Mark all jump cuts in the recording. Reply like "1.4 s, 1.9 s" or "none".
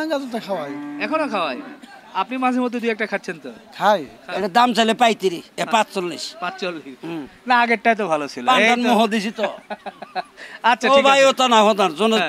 4.2 s

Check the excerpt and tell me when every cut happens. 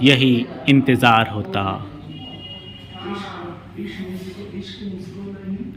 none

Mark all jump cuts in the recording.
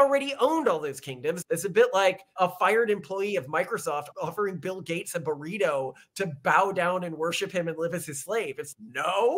1.4 s, 2.3 s, 4.1 s

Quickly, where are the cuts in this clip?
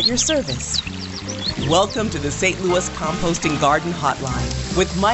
none

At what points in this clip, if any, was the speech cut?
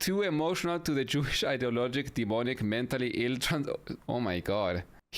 3.9 s

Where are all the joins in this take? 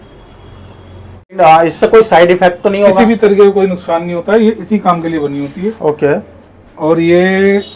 1.4 s

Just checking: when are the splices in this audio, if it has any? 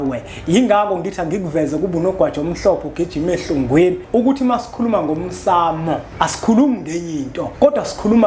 4.0 s, 6.1 s, 7.4 s

